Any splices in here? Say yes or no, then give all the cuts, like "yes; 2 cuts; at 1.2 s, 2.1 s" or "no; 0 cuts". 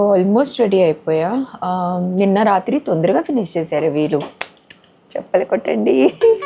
no; 0 cuts